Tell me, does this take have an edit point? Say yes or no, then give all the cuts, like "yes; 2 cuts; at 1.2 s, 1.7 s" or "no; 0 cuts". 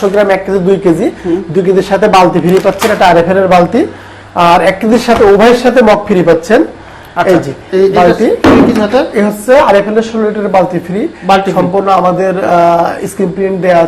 no; 0 cuts